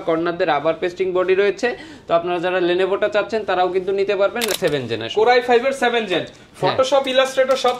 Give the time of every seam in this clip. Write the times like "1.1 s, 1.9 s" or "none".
4.5 s